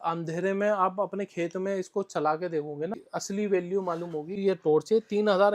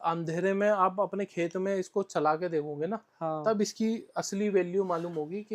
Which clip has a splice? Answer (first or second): first